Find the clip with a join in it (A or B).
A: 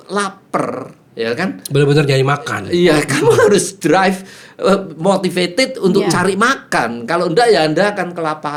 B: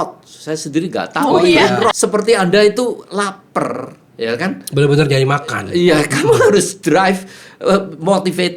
B